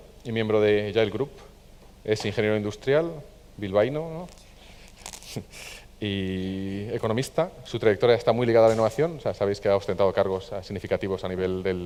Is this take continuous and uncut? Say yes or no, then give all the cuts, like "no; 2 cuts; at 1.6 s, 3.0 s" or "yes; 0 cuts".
yes; 0 cuts